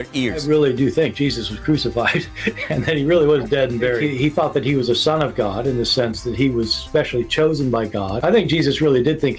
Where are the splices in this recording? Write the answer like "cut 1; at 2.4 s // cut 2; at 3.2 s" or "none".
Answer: cut 1; at 2.6 s